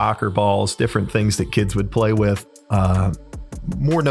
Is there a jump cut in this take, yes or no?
no